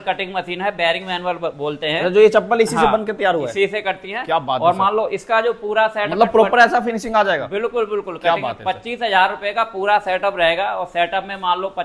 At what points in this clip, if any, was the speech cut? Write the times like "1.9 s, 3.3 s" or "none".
none